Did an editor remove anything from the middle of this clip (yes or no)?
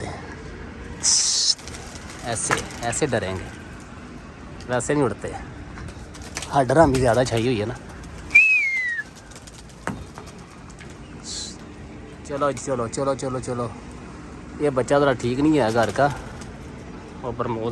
no